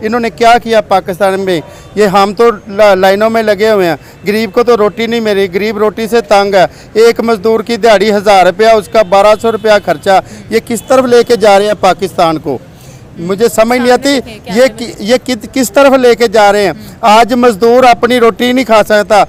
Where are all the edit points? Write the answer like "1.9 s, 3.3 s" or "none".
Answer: none